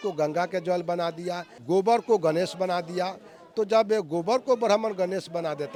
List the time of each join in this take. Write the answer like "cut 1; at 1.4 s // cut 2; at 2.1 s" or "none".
none